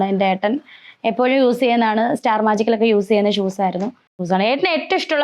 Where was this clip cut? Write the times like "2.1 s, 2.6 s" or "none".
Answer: 4.2 s

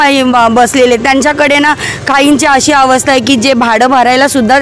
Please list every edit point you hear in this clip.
none

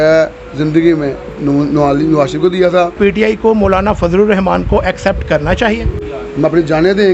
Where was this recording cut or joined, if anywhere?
3.0 s, 6.0 s

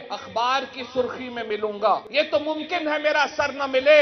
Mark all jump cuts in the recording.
2.1 s

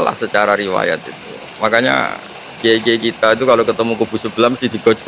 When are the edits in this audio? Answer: none

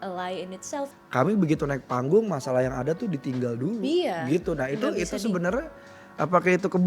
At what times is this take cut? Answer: 1.0 s

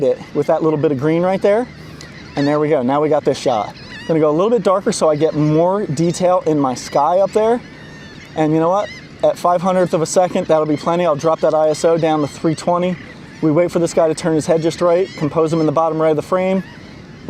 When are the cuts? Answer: none

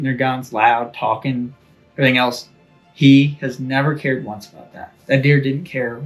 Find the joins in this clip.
4.9 s

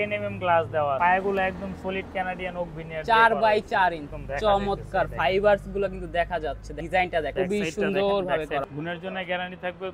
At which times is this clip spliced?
1.0 s, 4.2 s, 6.7 s, 7.3 s, 8.6 s

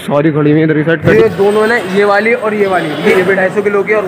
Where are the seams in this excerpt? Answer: 1.1 s, 3.1 s

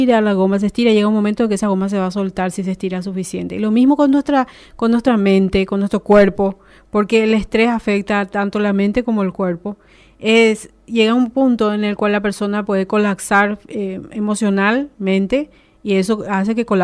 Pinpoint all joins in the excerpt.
14.6 s

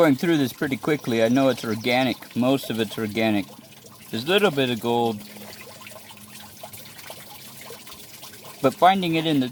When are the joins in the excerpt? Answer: none

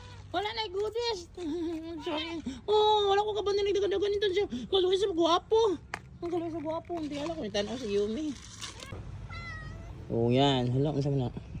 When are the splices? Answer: 8.9 s

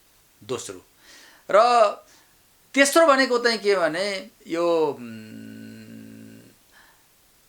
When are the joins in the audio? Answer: none

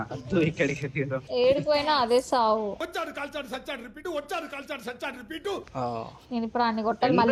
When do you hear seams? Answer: none

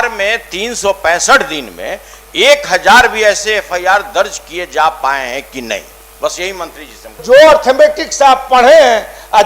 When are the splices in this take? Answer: 7.2 s

